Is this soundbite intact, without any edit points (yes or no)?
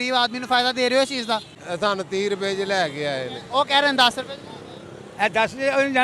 no